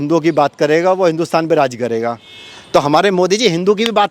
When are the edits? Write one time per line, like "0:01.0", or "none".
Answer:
none